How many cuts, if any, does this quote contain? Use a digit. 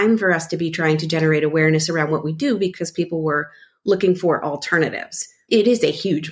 1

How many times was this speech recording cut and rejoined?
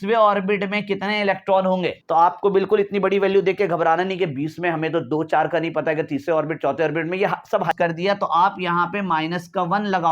2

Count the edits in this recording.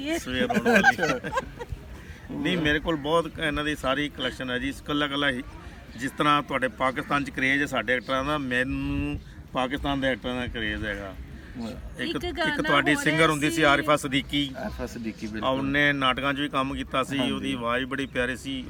0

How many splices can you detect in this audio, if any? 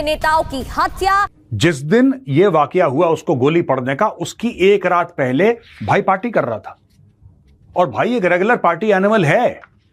0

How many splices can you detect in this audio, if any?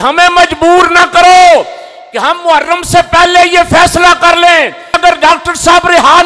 1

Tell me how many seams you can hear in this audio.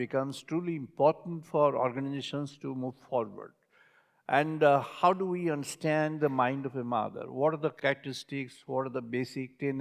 1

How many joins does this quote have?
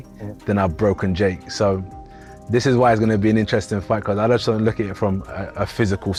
0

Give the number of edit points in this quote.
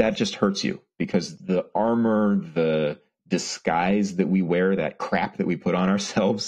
1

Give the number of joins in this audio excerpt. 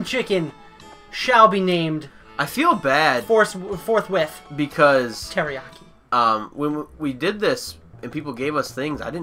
1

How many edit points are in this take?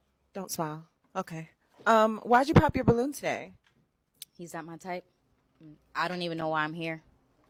0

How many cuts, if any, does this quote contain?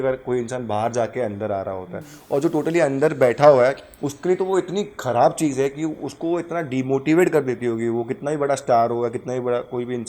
0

